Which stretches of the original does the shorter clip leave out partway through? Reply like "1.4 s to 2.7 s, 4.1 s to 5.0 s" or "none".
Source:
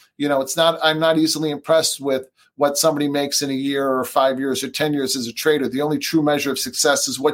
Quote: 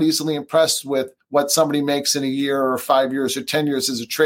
2.3 s to 2.4 s